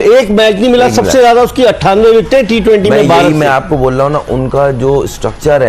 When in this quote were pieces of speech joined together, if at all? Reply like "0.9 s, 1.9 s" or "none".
none